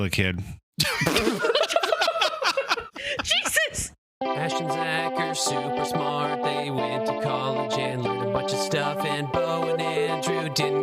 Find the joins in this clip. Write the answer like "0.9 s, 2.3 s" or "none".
4.1 s